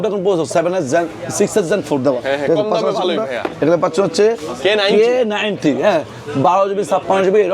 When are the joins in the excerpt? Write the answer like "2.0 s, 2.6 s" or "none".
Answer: none

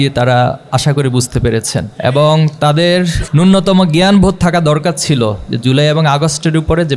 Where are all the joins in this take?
1.9 s, 3.2 s

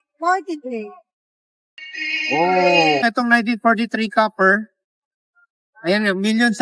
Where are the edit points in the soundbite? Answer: 3.0 s

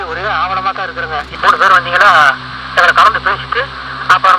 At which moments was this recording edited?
1.3 s

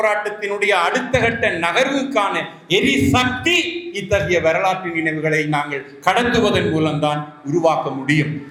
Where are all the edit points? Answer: none

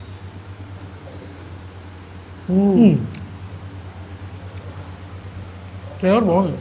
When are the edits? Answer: none

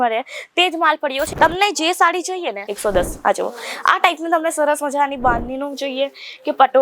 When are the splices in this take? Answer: 1.3 s, 2.7 s

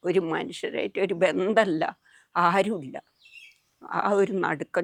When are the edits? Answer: none

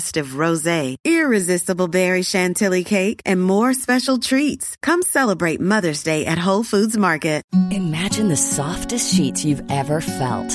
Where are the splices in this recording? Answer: 7.4 s

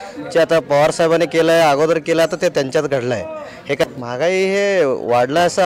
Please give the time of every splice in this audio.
3.8 s

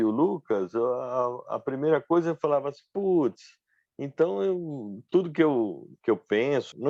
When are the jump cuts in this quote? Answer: none

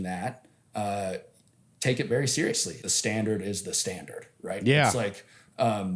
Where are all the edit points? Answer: 2.8 s

